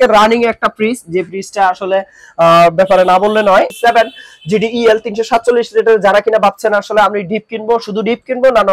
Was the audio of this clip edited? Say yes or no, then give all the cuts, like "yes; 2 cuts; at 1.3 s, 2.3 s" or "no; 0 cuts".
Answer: yes; 1 cut; at 3.7 s